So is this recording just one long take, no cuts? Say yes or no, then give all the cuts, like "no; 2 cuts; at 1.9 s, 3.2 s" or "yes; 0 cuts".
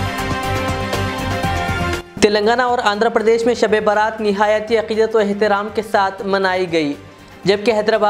no; 1 cut; at 1.8 s